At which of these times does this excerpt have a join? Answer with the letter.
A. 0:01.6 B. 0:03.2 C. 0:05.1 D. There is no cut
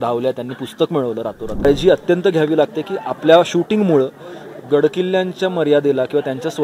A